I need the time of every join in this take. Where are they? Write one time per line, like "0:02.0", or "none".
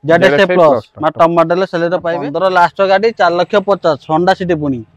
0:02.2

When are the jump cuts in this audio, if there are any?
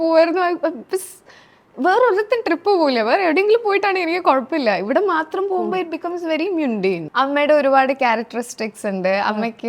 0:07.1

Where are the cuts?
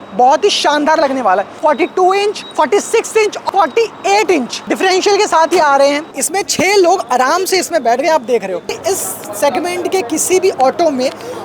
0:01.6
0:02.4
0:03.5
0:04.6
0:06.1
0:08.8

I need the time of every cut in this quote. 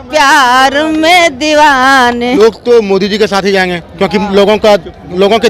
0:02.4

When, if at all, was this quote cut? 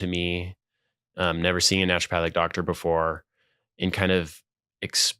none

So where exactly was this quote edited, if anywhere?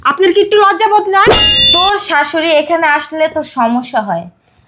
0:01.4

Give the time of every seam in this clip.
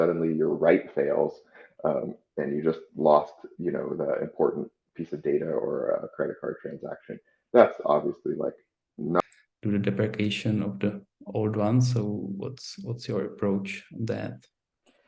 0:09.2

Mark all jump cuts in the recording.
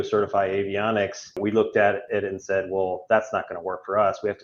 0:01.2

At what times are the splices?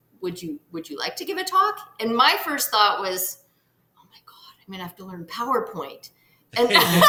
none

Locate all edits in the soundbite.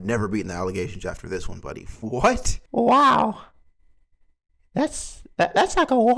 0:02.6

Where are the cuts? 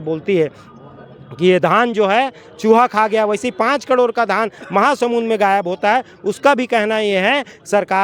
none

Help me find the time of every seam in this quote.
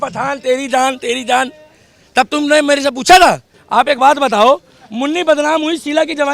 0:03.5

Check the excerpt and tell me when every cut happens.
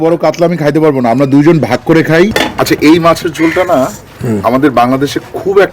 0:02.3

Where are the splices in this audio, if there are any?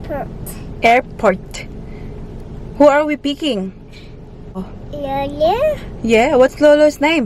0:04.7

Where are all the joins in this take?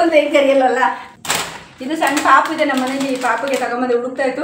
0:01.0

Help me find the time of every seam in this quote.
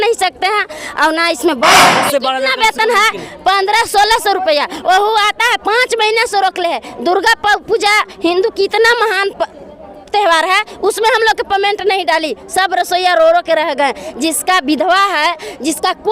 0:01.9

